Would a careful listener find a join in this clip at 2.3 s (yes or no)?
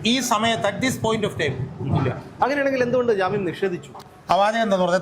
no